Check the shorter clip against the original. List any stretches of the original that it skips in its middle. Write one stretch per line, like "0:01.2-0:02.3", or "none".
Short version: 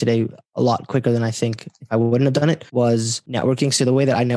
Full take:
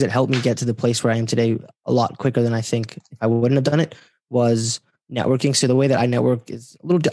0:04.2-0:04.7